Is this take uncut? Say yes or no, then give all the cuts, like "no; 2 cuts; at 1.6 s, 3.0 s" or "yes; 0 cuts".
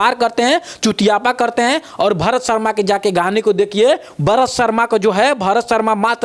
yes; 0 cuts